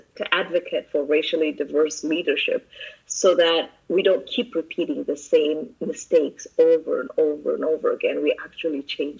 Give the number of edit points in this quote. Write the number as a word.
zero